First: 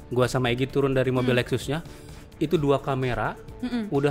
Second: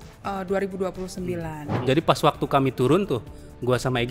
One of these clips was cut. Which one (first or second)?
second